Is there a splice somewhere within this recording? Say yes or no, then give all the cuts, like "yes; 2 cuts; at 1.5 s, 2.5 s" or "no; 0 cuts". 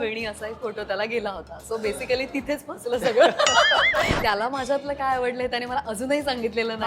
yes; 1 cut; at 4.1 s